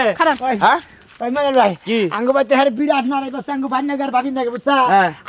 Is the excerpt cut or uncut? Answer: uncut